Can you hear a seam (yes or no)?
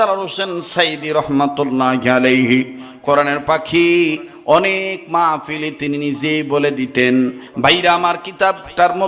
yes